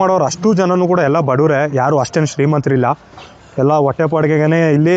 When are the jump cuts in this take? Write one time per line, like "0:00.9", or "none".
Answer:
none